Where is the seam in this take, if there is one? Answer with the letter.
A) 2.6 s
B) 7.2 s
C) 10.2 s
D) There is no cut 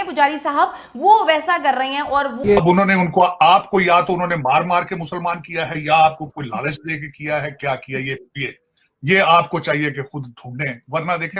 A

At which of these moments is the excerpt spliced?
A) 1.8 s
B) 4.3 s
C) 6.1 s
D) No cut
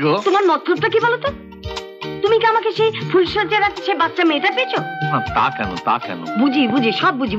D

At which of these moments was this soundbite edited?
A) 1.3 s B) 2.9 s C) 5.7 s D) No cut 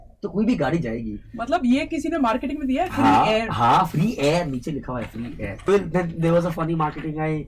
C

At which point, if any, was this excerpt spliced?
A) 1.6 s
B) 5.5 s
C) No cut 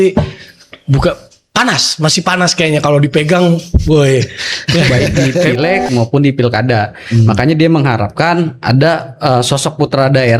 B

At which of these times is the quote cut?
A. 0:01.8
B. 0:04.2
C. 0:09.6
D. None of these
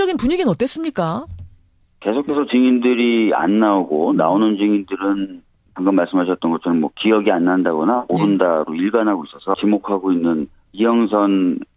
D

